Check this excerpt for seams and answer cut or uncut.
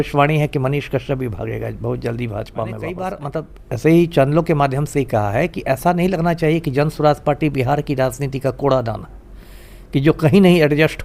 cut